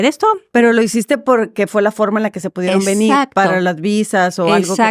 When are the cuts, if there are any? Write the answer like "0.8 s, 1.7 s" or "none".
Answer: none